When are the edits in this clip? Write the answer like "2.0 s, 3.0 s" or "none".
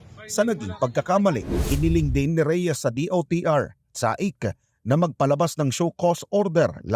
1.5 s